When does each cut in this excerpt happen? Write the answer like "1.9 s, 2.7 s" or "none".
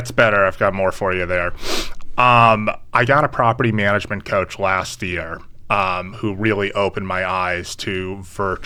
none